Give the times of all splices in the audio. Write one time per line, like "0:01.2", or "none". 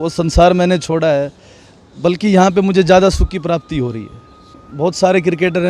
0:04.6